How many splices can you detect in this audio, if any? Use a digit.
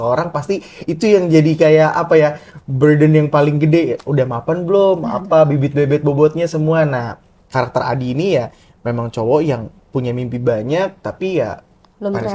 0